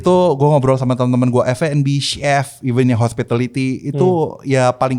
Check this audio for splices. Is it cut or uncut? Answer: uncut